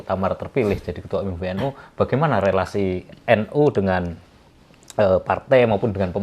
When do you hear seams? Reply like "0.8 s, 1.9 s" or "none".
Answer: none